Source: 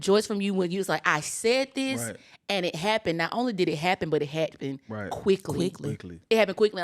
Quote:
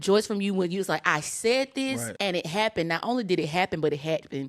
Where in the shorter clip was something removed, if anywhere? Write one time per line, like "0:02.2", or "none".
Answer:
0:02.1